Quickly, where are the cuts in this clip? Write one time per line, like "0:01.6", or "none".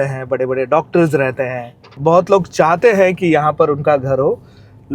0:02.0